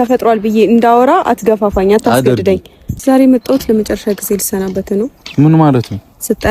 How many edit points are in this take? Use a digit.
1